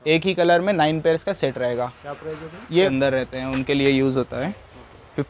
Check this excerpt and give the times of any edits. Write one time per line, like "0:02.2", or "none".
0:02.8